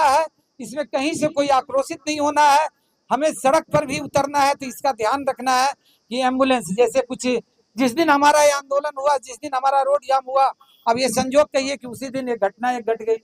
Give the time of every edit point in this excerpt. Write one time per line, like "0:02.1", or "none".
none